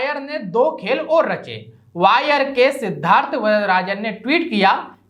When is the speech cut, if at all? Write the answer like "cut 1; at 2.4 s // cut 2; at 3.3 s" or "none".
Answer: none